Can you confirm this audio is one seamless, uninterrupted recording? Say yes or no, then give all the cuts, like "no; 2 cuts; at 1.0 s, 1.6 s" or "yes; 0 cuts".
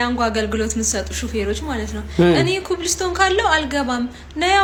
yes; 0 cuts